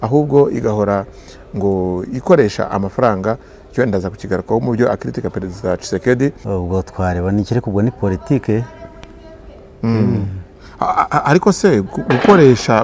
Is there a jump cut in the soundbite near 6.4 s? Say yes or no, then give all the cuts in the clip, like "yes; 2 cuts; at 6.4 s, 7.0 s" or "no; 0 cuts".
yes; 1 cut; at 6.4 s